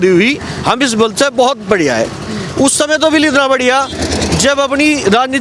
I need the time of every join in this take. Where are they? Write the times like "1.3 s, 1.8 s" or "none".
none

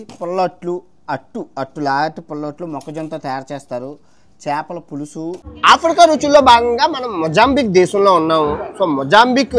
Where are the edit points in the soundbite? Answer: 5.5 s

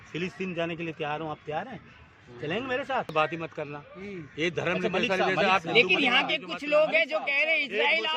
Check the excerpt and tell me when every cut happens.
3.1 s

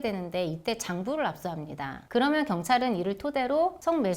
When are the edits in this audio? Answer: 1.9 s

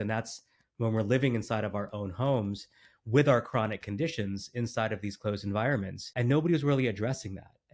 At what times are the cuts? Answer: 6.0 s

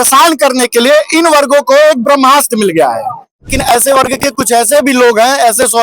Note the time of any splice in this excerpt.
3.5 s

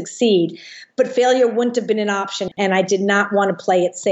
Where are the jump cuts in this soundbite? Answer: 2.5 s

